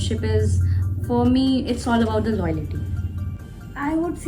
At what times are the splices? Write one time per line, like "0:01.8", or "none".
0:03.2